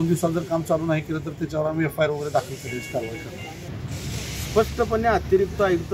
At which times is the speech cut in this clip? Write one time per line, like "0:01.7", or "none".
0:03.7